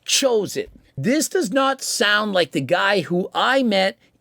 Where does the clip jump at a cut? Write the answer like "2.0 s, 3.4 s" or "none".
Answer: 0.9 s